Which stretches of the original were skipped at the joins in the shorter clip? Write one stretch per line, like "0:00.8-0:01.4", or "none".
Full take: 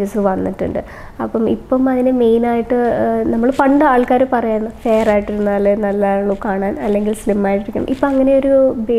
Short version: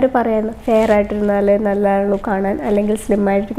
none